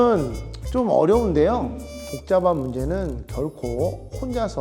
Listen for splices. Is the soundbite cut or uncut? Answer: cut